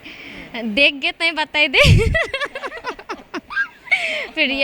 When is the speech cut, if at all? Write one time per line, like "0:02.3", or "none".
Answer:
none